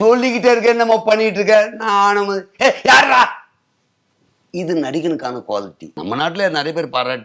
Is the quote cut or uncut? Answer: cut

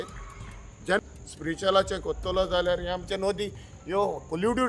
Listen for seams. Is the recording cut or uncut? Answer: cut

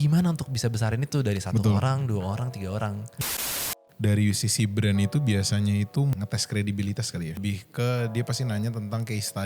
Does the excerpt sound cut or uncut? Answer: cut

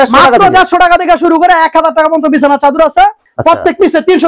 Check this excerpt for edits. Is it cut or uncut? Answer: cut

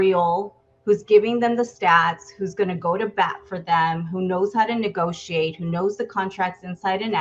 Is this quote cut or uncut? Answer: uncut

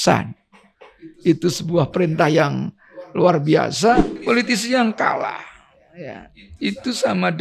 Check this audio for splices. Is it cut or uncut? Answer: cut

